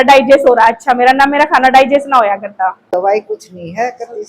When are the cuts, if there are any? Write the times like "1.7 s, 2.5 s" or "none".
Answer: 2.9 s